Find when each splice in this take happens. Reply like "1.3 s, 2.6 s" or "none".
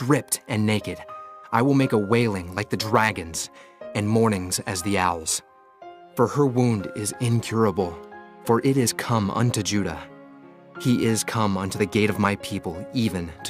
none